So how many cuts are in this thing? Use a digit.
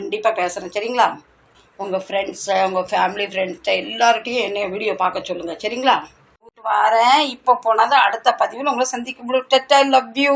1